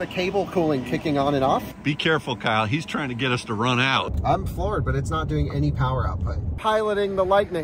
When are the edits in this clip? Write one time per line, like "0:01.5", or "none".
0:01.7
0:04.1
0:06.6